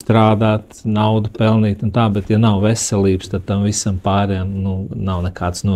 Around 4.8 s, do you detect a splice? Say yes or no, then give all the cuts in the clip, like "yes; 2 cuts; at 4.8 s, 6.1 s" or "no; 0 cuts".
no; 0 cuts